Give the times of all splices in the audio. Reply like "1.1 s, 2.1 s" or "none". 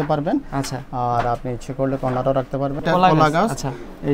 2.8 s